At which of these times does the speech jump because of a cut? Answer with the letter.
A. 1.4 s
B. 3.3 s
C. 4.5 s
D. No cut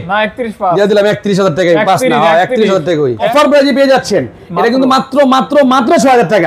B